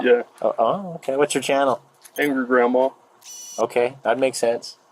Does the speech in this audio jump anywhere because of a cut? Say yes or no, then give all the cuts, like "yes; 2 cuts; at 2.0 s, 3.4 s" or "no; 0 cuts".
no; 0 cuts